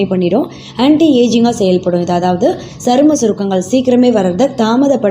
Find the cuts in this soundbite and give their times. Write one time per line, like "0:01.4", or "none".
none